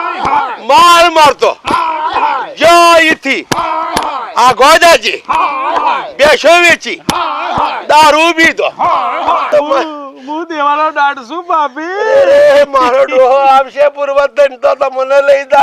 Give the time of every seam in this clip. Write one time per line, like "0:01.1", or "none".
0:09.5